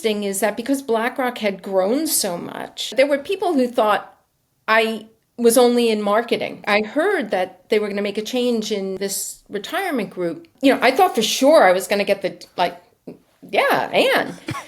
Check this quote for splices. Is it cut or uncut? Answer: cut